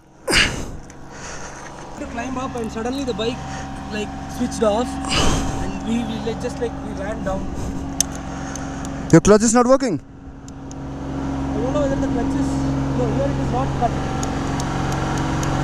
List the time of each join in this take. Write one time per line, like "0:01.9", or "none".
none

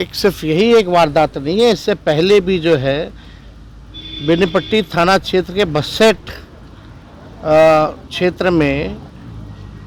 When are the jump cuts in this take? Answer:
none

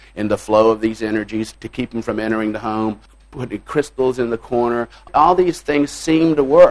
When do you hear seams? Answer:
0:01.5
0:03.1
0:05.1

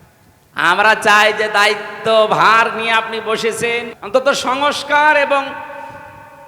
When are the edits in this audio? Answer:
0:03.9

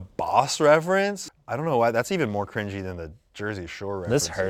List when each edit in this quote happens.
0:01.2

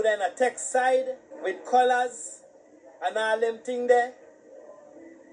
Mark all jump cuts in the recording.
0:01.2

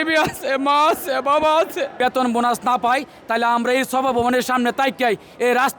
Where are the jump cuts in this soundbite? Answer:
0:02.0

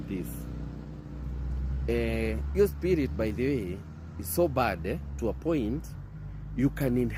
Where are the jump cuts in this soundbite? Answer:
none

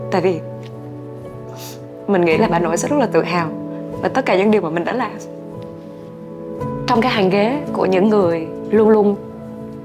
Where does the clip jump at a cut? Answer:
0:08.5

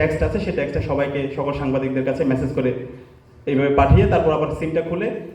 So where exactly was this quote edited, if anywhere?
none

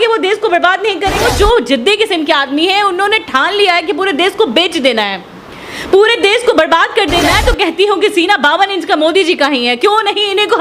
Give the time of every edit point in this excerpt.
0:01.2
0:07.3

